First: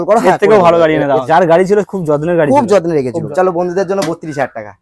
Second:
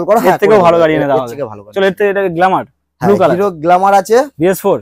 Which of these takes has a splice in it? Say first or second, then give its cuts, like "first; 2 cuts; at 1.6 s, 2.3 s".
first; 2 cuts; at 1.2 s, 3.2 s